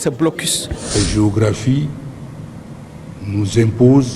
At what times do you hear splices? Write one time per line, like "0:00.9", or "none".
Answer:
0:00.9